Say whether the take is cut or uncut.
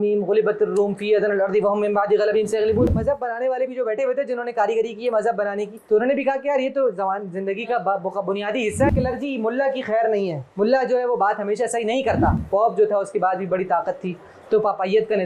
cut